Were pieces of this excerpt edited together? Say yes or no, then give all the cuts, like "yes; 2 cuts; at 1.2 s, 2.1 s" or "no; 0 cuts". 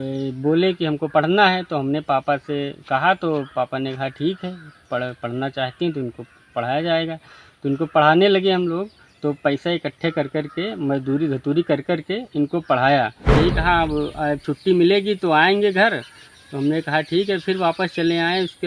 yes; 1 cut; at 13.4 s